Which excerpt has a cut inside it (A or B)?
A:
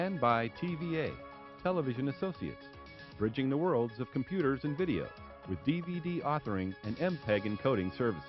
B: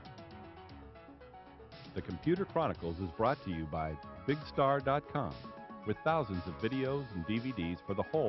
B